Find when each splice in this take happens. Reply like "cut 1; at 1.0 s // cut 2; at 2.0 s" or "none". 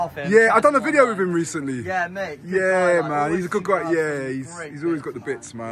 none